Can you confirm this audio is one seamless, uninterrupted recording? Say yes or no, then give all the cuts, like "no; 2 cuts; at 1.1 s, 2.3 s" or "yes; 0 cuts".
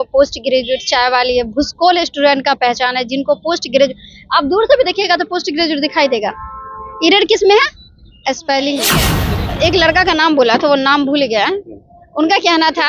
no; 1 cut; at 9.2 s